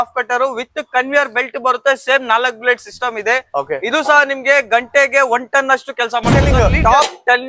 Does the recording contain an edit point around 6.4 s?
yes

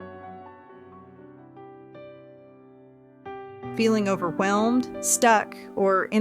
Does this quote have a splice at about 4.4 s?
no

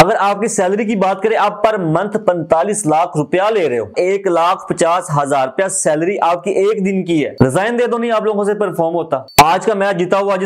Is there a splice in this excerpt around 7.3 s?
yes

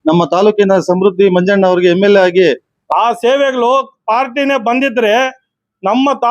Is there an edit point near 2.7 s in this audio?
yes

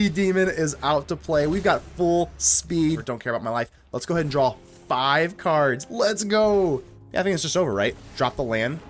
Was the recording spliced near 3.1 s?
yes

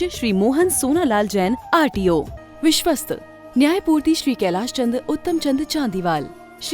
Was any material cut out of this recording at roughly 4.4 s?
no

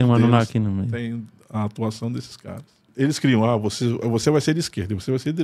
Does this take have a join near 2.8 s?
yes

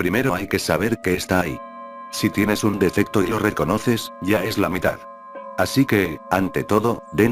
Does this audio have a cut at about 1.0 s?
no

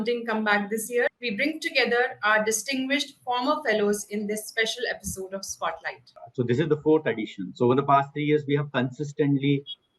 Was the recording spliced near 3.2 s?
no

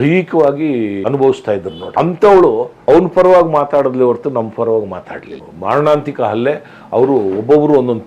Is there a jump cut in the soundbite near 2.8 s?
yes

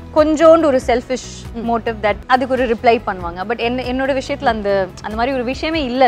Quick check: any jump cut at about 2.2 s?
yes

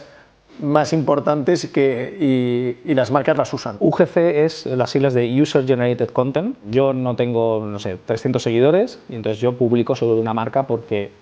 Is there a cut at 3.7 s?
yes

